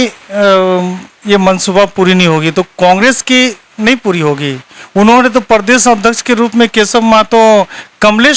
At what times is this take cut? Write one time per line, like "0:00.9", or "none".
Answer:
none